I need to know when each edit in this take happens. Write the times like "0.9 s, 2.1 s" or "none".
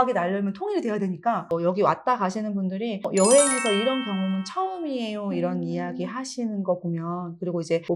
1.4 s